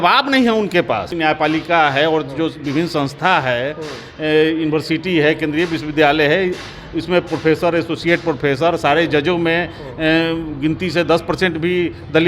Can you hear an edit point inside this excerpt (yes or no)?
yes